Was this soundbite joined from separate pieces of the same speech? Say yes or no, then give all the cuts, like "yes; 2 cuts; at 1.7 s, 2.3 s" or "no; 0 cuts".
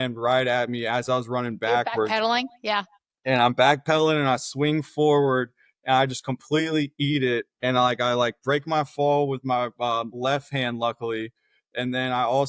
no; 0 cuts